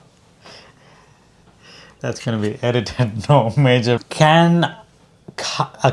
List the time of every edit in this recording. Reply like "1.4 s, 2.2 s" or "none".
4.0 s